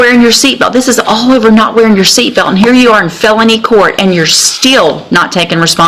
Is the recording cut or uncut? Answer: uncut